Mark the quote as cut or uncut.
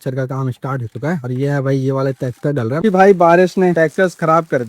cut